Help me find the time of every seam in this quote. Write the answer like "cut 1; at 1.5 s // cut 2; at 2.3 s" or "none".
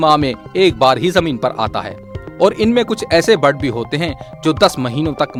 none